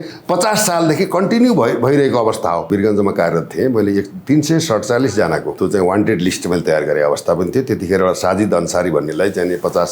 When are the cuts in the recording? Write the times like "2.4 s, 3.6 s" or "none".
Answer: 2.7 s, 5.5 s